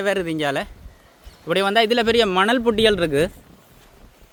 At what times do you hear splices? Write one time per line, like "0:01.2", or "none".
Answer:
none